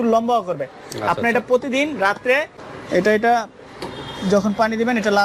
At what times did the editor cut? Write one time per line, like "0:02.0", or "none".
0:02.6